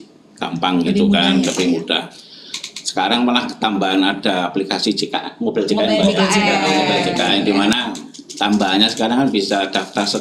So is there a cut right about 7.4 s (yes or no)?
no